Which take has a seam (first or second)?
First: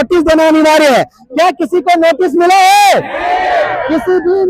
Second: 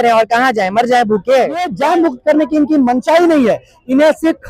second